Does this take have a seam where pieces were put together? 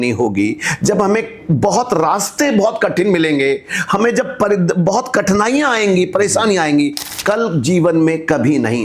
yes; 1 cut; at 7.0 s

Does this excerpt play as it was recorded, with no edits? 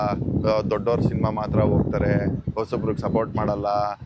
yes; 0 cuts

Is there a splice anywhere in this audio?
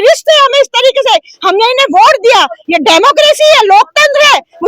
no; 0 cuts

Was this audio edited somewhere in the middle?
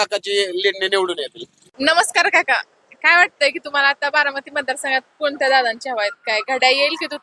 no; 0 cuts

